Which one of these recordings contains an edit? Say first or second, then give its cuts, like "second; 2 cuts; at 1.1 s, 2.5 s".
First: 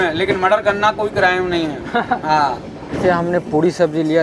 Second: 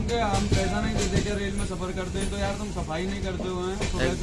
first; 1 cut; at 3.0 s